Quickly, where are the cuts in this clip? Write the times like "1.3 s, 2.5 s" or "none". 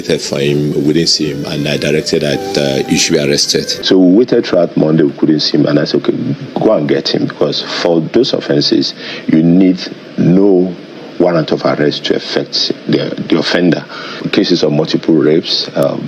3.7 s, 14.2 s